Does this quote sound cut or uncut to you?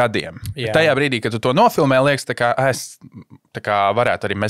uncut